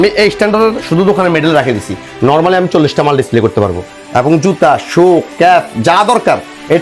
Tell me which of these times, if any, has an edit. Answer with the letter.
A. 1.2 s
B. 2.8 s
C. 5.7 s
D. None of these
D